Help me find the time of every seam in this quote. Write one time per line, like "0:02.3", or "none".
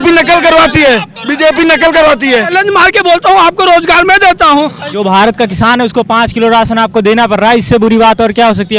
0:02.5
0:04.9